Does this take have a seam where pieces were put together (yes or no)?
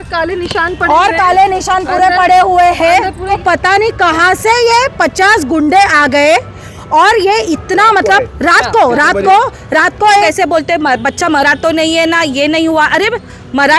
yes